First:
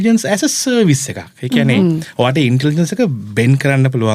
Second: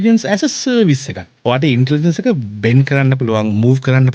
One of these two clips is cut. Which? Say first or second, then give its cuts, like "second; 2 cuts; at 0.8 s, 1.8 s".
second; 1 cut; at 1.3 s